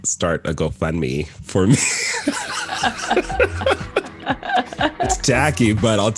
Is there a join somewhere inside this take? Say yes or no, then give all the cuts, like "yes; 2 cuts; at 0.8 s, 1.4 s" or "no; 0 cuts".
no; 0 cuts